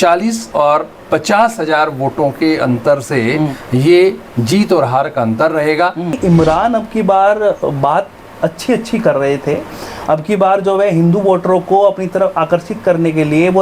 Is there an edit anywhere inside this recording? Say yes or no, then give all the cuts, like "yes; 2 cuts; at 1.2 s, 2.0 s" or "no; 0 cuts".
yes; 1 cut; at 6.2 s